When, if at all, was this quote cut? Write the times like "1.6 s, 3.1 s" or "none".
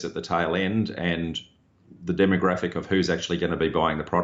none